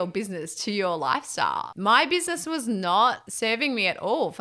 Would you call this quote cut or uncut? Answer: cut